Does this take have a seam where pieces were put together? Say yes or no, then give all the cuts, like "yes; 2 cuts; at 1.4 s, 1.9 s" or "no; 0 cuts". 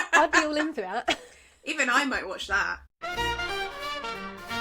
yes; 1 cut; at 2.8 s